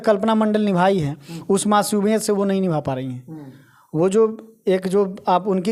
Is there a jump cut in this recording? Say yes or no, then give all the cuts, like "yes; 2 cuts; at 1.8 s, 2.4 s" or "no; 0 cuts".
no; 0 cuts